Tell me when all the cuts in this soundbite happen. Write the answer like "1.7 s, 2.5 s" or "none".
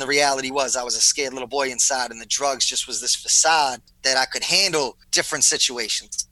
3.9 s, 5.0 s